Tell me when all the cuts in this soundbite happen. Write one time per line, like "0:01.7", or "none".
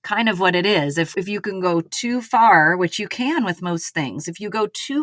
none